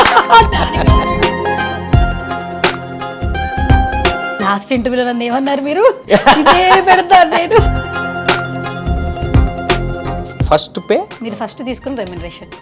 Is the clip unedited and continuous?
yes; 0 cuts

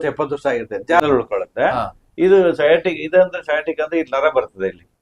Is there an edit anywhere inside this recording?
yes; 1 cut; at 1.0 s

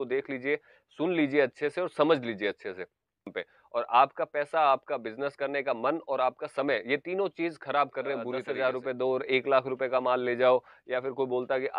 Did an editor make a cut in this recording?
yes; 2 cuts; at 3.4 s, 8.5 s

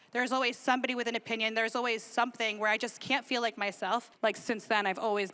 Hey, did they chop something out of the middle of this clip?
yes; 1 cut; at 4.1 s

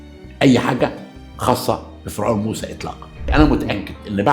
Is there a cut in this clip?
yes; 1 cut; at 3.3 s

